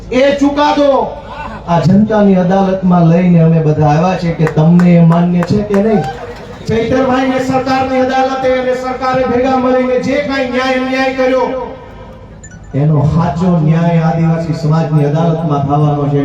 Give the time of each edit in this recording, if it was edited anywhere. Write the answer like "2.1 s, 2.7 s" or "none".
6.2 s